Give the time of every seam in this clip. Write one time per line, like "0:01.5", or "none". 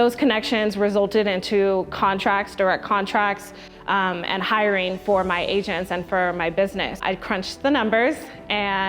0:07.0